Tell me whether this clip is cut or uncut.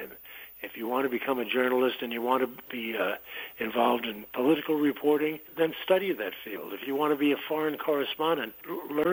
uncut